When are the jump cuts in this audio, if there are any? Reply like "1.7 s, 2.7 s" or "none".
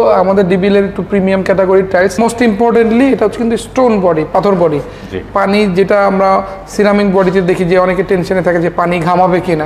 2.2 s